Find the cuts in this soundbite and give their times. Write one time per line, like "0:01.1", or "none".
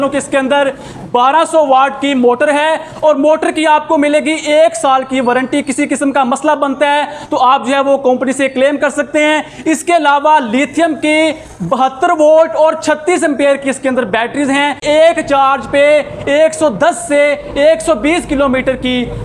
0:14.8